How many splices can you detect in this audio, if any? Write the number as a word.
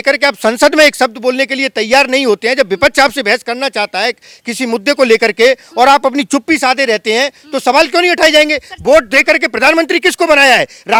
zero